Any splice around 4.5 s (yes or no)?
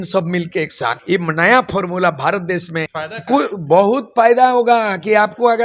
no